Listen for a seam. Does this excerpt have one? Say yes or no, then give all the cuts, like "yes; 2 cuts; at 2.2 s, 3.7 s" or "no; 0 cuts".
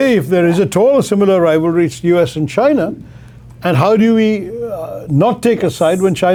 no; 0 cuts